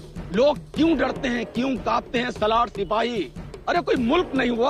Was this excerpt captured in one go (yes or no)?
yes